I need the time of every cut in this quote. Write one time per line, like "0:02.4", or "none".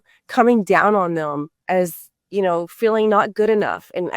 0:01.5